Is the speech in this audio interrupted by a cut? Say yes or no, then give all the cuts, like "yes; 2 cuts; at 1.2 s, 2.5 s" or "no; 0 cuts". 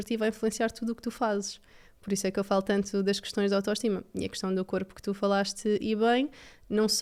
no; 0 cuts